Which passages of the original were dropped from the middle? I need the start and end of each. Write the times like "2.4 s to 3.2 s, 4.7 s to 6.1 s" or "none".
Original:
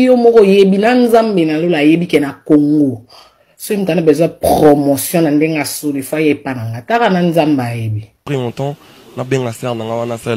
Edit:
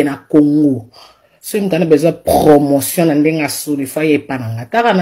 none